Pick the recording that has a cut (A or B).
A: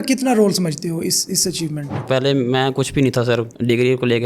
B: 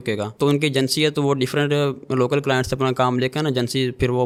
A